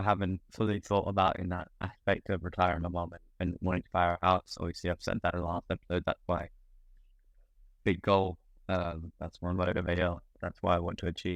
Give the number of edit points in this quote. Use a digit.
0